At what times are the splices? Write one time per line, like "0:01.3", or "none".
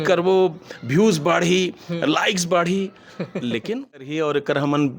0:03.8